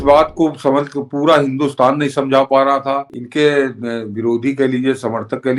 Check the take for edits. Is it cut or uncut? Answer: cut